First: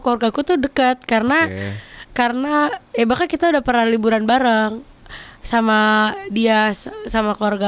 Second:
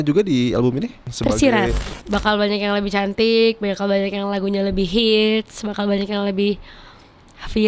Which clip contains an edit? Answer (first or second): second